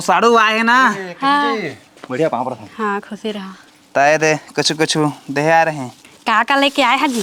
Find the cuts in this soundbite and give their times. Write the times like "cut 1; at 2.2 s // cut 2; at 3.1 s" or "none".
none

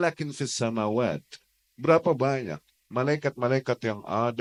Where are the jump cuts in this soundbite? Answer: none

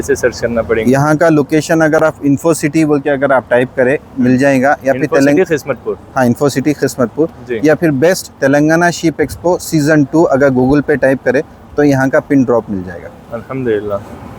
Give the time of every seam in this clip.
none

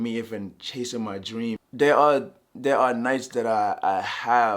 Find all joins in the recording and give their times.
cut 1; at 1.7 s

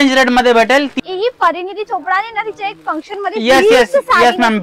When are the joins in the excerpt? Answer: cut 1; at 0.9 s

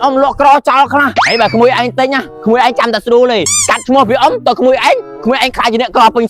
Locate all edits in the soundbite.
cut 1; at 1.2 s // cut 2; at 2.3 s // cut 3; at 3.5 s

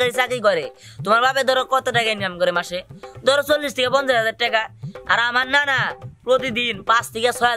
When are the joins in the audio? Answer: none

